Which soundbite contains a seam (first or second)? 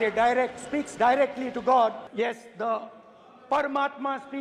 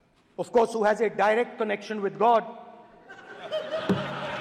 first